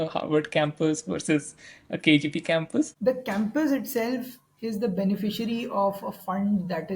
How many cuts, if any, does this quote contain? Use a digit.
1